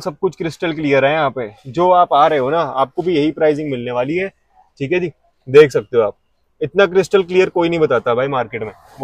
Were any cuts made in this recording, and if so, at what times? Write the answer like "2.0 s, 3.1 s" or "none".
none